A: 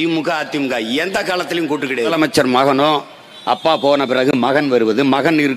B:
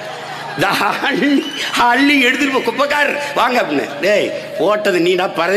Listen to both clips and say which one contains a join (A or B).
A